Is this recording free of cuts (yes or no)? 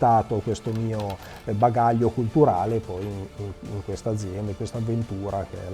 yes